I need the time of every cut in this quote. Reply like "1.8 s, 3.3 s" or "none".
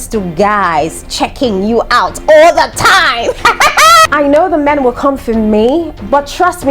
4.1 s